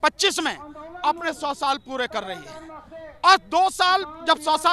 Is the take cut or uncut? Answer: uncut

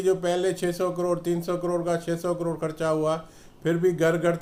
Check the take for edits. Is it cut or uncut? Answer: uncut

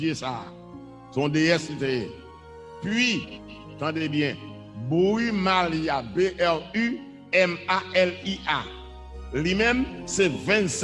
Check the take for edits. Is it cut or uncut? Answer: uncut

